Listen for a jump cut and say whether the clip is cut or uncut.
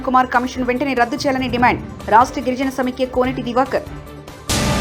uncut